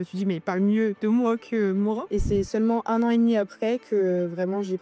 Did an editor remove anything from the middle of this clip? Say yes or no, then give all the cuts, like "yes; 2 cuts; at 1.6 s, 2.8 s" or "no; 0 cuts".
yes; 1 cut; at 2.0 s